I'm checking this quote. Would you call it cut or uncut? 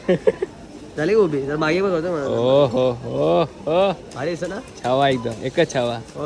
uncut